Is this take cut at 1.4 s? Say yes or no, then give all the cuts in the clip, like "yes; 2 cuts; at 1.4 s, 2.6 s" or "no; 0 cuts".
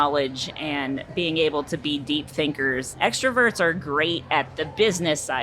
no; 1 cut; at 2.9 s